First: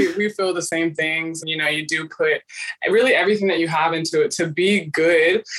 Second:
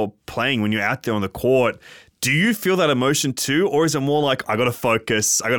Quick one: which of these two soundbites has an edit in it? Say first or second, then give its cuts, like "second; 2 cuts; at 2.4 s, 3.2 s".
first; 2 cuts; at 1.3 s, 2.6 s